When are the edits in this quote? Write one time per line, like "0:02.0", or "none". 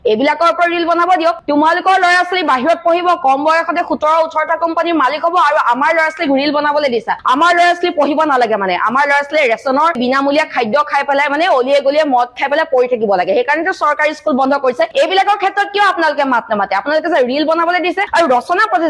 none